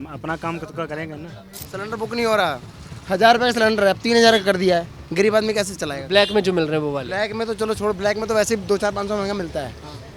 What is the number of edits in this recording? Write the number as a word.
one